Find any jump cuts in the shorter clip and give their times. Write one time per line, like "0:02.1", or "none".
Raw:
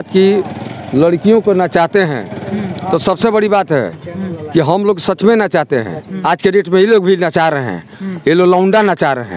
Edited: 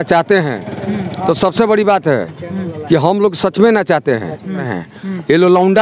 0:04.6